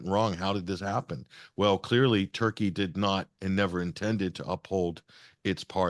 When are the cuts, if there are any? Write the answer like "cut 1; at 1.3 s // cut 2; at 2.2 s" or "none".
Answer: none